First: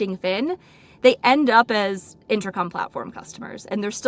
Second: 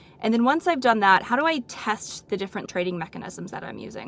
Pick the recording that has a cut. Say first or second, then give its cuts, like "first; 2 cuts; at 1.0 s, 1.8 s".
second; 1 cut; at 2.3 s